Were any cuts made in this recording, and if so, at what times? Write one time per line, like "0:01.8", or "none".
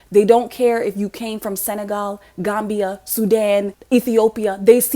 0:03.8